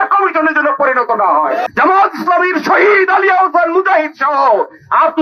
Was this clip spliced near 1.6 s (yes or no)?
yes